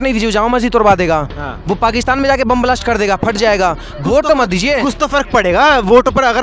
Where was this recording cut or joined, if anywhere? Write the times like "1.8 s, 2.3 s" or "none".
none